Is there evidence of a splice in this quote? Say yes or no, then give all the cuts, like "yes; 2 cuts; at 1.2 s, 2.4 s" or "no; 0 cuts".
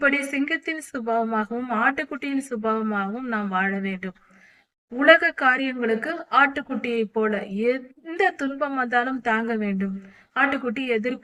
no; 0 cuts